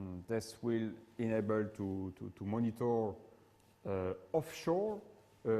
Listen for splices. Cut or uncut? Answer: cut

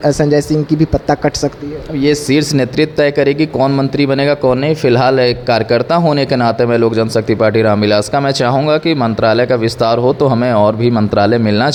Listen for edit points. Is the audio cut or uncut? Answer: uncut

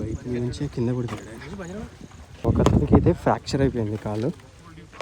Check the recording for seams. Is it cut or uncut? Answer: cut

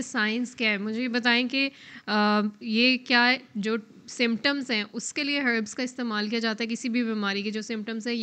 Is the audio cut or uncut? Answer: uncut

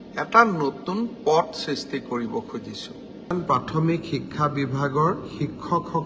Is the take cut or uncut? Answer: cut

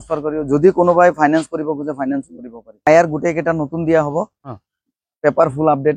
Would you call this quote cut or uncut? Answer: cut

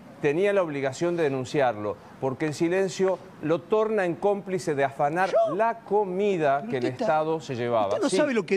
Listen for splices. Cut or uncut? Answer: uncut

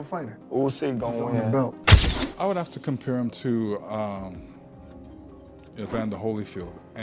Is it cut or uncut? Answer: cut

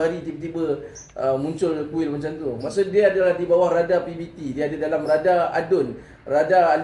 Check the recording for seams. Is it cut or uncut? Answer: uncut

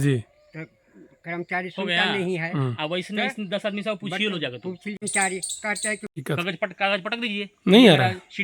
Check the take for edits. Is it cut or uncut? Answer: cut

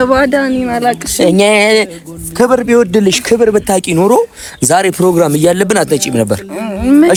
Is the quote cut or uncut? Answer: uncut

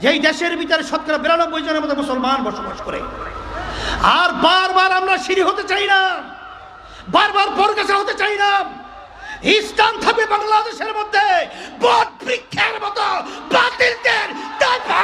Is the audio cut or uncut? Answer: uncut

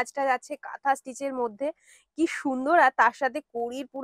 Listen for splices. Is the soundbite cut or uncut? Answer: uncut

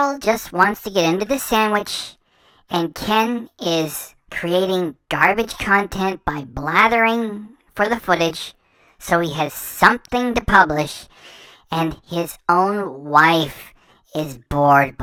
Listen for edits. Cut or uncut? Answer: uncut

